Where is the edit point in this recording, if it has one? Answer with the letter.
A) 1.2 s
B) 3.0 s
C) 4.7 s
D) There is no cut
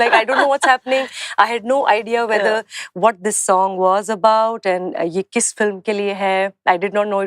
D